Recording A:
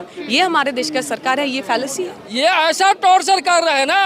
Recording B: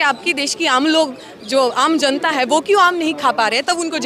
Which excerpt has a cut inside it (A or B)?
A